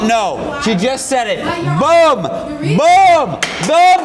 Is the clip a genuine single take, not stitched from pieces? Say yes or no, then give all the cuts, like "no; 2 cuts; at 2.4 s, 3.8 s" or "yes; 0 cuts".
yes; 0 cuts